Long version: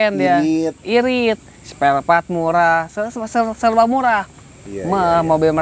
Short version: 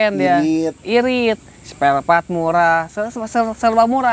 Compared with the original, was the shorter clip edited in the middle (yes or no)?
no